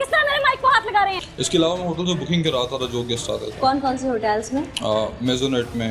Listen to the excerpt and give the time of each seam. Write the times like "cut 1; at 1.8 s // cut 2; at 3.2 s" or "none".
cut 1; at 1.2 s